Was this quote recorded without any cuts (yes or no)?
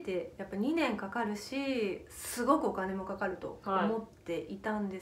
yes